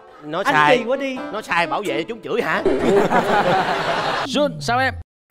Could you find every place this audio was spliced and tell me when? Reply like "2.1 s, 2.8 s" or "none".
4.2 s